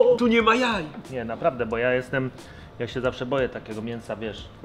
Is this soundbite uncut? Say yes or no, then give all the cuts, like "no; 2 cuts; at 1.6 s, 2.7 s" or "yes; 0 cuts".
yes; 0 cuts